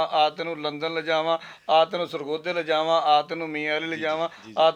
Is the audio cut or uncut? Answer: uncut